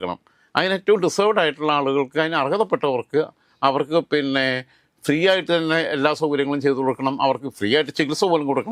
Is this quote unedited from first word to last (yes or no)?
yes